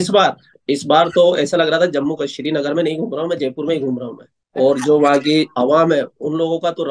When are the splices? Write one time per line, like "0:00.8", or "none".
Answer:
none